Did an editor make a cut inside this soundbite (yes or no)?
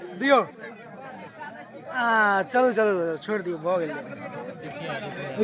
no